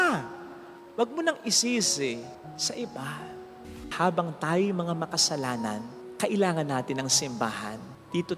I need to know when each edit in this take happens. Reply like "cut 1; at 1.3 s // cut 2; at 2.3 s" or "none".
cut 1; at 3.8 s